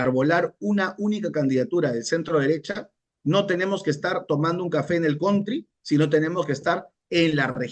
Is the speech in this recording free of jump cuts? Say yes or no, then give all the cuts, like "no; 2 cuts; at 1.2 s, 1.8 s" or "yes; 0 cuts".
yes; 0 cuts